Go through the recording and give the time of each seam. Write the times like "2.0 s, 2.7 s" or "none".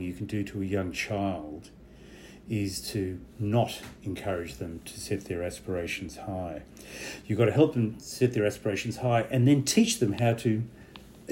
none